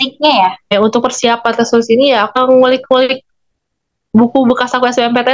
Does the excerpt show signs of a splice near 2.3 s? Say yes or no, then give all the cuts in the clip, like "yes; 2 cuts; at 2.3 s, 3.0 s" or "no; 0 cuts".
yes; 2 cuts; at 0.7 s, 2.3 s